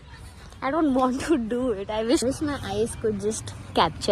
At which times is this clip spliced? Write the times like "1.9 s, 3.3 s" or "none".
2.2 s